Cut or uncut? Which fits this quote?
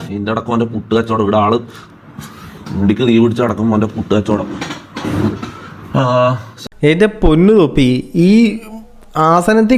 uncut